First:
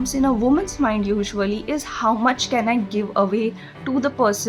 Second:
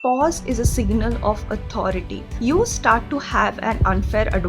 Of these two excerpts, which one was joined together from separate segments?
second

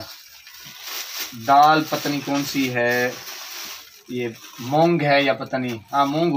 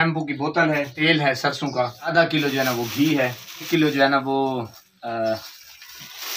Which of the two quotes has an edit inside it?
second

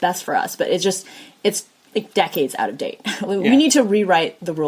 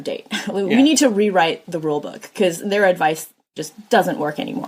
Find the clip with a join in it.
second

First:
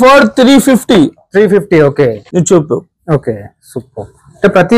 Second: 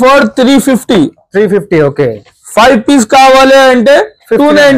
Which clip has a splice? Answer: first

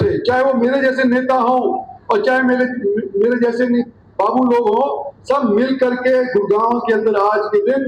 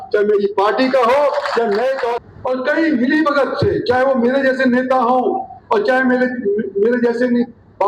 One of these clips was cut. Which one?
second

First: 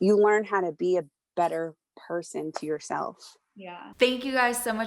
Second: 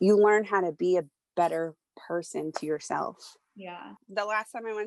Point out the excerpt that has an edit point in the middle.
second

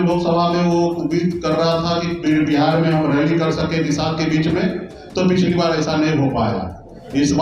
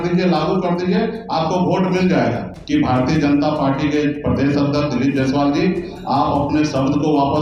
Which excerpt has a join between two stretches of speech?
second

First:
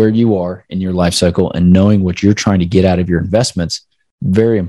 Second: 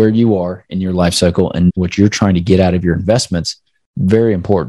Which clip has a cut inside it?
second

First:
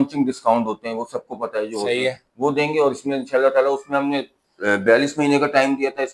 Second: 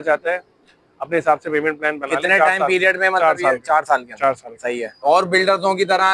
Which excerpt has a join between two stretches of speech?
second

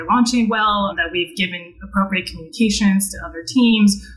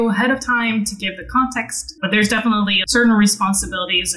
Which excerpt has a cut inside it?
second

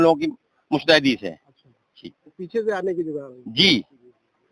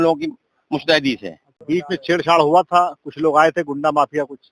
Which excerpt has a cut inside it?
second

